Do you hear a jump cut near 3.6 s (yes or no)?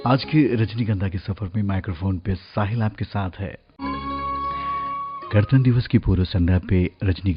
yes